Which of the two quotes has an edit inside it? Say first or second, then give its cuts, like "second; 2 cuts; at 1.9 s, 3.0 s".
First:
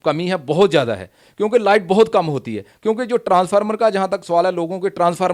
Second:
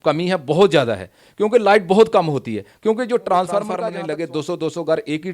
second; 1 cut; at 3.9 s